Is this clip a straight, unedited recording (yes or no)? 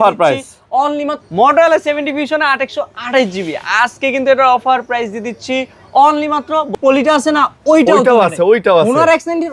no